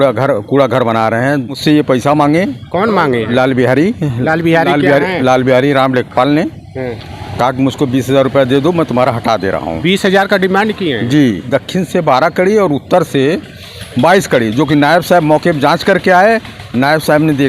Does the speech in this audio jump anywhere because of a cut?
yes; 2 cuts; at 1.6 s, 11.4 s

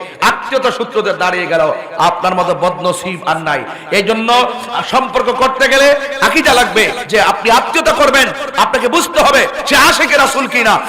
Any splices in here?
yes; 1 cut; at 7.0 s

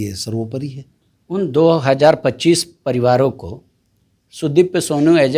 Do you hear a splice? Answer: no; 0 cuts

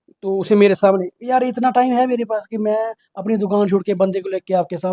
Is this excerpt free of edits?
yes; 0 cuts

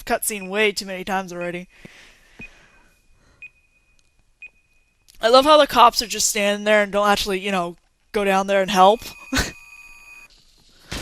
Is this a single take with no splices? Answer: no; 1 cut; at 6.9 s

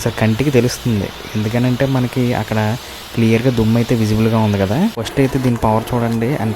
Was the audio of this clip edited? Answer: yes; 1 cut; at 5.1 s

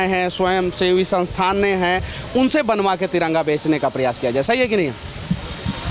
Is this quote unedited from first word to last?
yes; 0 cuts

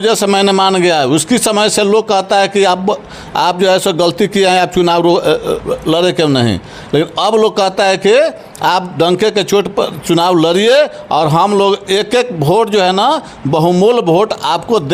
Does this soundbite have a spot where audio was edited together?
no; 0 cuts

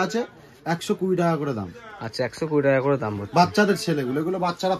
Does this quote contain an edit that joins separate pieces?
no; 0 cuts

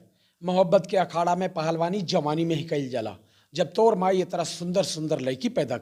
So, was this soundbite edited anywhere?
no; 0 cuts

